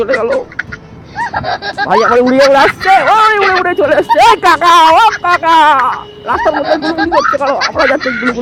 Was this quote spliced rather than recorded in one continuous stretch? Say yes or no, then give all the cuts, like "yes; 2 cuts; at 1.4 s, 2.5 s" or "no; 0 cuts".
no; 0 cuts